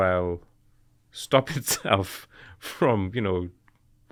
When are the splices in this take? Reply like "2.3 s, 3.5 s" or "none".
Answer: none